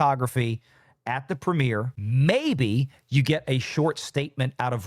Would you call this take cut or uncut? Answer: cut